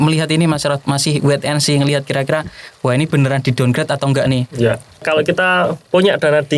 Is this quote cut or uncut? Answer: cut